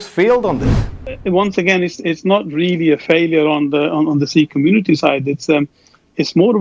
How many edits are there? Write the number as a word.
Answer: one